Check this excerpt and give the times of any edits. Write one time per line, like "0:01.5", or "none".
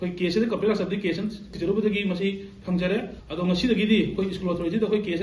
0:01.5

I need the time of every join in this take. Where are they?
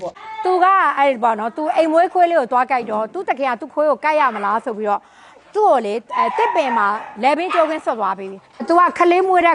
0:08.6

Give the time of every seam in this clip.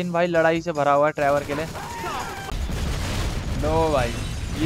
0:02.5

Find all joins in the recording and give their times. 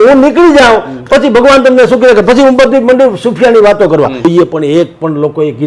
0:04.2

